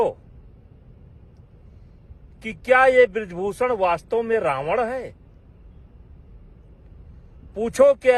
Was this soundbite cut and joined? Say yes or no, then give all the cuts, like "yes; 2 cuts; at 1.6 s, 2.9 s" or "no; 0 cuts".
no; 0 cuts